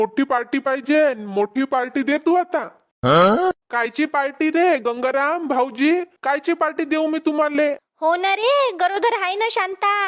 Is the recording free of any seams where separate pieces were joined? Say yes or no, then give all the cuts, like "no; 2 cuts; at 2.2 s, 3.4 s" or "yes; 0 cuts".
no; 1 cut; at 7.9 s